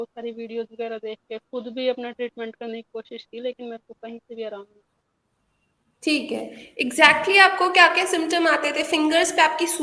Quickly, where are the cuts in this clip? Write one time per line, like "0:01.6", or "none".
none